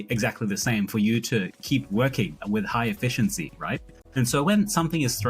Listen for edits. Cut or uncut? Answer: uncut